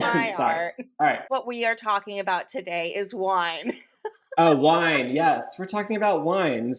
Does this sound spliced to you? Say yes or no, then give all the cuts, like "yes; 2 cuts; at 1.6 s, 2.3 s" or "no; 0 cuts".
yes; 1 cut; at 1.2 s